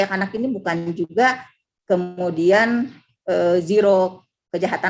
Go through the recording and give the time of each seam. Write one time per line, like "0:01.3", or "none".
none

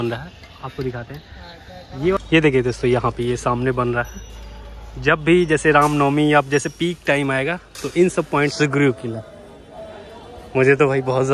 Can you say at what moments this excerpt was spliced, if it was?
0:02.2
0:08.5

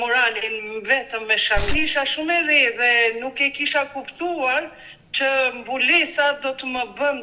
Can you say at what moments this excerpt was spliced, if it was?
0:01.7

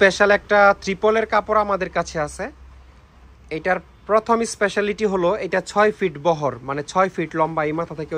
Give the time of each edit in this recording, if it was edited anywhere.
none

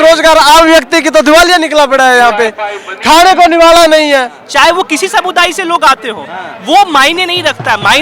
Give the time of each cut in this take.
0:04.4

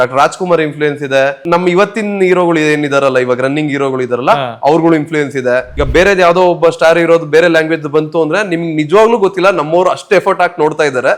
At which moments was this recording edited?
0:01.4
0:05.8

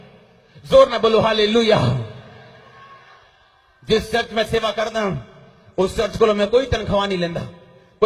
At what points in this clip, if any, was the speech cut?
none

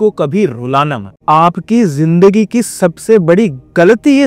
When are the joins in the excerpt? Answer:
0:01.1

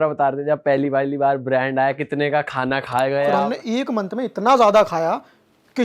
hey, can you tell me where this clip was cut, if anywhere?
0:03.3

